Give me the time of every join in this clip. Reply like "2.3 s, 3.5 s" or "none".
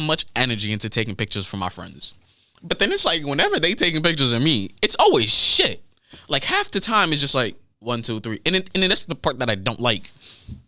none